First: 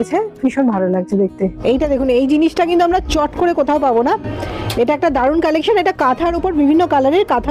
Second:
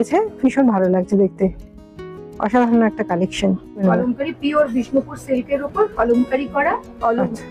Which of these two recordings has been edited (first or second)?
first